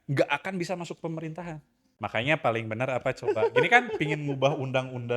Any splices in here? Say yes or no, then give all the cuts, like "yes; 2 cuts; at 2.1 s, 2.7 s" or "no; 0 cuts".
yes; 1 cut; at 1.9 s